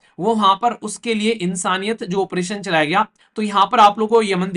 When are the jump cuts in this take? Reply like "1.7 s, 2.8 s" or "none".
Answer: 3.2 s